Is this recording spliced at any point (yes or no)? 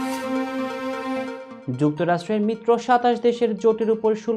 no